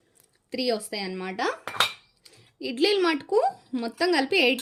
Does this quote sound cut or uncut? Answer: uncut